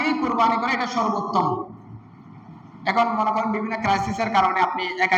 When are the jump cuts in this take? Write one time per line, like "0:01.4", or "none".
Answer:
none